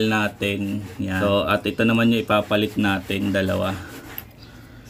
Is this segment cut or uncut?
cut